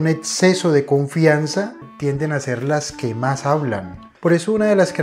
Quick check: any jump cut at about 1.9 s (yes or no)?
yes